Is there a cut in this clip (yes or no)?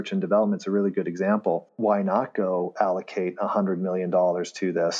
no